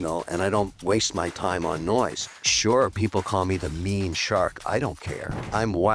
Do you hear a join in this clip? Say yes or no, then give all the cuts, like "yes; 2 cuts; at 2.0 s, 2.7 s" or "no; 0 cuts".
no; 0 cuts